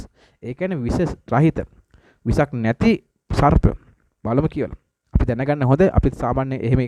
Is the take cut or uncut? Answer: uncut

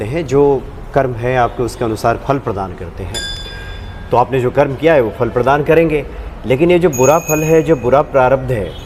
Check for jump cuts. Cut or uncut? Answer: uncut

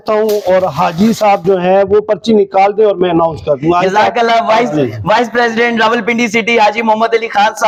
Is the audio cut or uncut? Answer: uncut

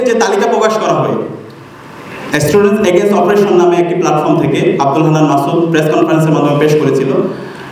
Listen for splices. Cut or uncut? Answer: uncut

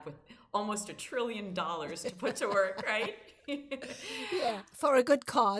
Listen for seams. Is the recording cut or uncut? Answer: cut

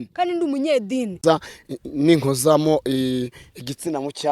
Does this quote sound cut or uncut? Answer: cut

